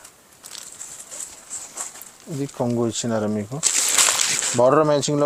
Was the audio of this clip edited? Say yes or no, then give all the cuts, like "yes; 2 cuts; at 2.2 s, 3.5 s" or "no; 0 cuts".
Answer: no; 0 cuts